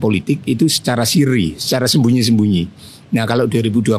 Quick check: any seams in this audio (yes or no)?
no